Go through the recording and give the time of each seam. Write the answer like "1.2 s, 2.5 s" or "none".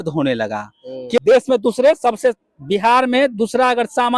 1.2 s